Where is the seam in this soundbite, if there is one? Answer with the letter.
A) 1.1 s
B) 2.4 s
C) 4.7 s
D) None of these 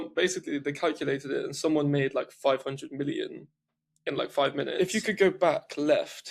C